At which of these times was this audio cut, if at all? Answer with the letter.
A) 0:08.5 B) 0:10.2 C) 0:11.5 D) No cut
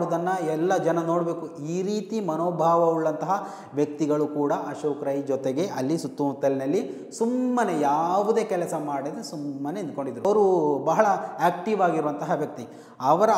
B